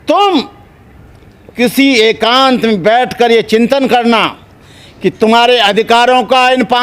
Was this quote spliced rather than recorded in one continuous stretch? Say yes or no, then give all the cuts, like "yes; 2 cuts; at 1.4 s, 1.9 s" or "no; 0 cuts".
no; 0 cuts